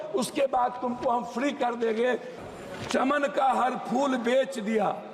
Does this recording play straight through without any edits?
no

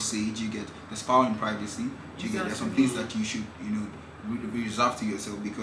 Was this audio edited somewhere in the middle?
no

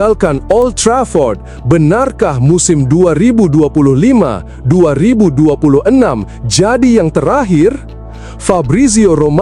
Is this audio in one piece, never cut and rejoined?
yes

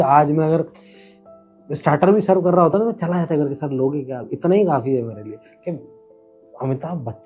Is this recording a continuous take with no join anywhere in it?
yes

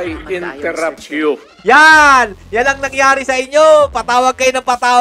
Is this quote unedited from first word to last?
no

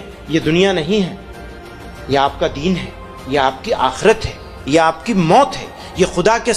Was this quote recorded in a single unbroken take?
yes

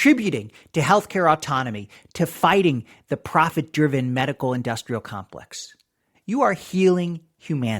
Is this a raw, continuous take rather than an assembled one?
no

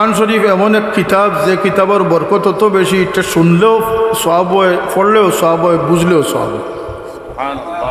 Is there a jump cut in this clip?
no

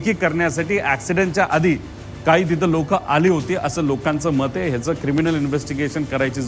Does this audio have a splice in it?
no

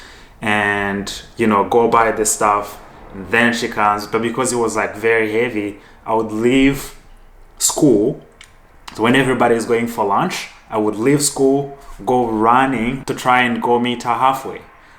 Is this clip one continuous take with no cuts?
no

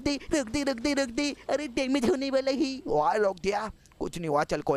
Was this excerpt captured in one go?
yes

